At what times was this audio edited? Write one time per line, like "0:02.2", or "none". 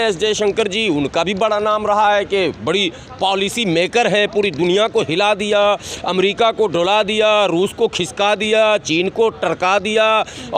none